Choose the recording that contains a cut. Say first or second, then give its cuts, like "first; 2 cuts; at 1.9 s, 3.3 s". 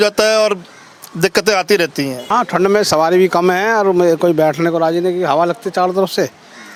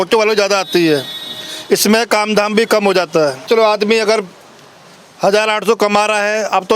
second; 1 cut; at 3.5 s